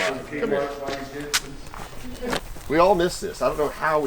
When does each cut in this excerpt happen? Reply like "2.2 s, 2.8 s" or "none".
2.4 s